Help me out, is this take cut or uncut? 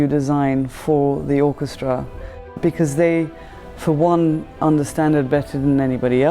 cut